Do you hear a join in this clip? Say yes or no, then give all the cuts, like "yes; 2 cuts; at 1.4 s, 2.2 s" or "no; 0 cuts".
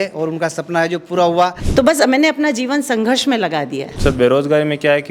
yes; 2 cuts; at 1.6 s, 3.8 s